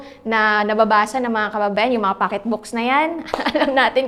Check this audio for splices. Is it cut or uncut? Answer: uncut